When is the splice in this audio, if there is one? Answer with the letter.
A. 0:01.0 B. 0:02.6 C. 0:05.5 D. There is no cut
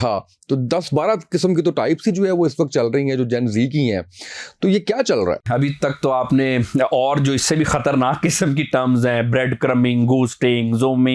C